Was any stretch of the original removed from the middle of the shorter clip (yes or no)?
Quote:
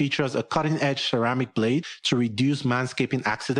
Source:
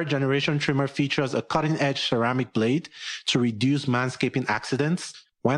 yes